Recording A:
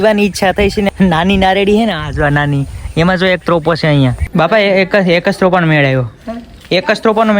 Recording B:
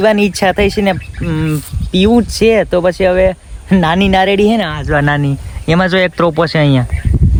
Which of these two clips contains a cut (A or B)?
A